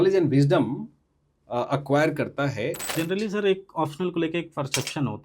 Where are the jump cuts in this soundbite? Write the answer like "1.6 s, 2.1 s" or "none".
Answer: 2.8 s